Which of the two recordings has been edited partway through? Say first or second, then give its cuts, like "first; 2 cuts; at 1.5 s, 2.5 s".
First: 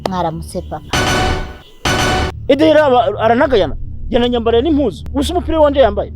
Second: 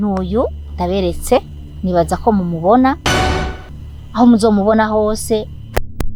first; 1 cut; at 2.3 s